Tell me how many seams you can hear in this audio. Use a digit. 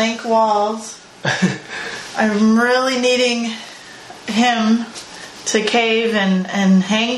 0